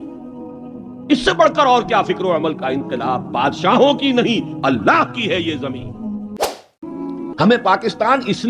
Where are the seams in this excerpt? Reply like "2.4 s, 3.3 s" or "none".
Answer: 6.6 s